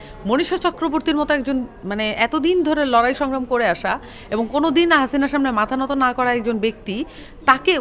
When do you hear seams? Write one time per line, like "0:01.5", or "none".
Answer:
none